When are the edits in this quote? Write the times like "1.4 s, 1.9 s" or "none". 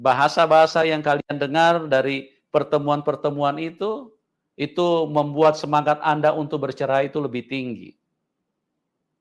none

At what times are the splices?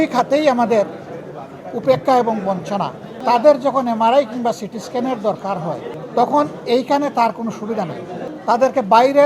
3.2 s, 5.9 s, 8.2 s

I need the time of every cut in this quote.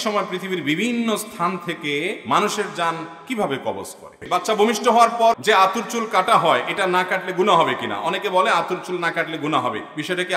4.2 s, 5.4 s

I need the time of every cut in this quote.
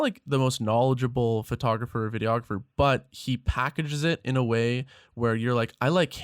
none

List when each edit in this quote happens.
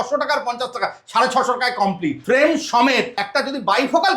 2.2 s, 3.2 s

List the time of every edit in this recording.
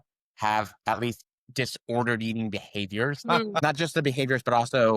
3.6 s

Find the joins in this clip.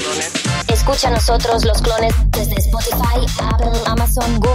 none

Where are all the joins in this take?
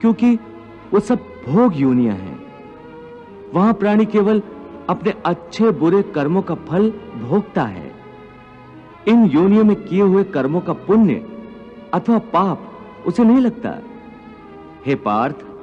8.8 s

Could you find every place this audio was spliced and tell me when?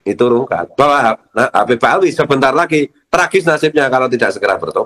none

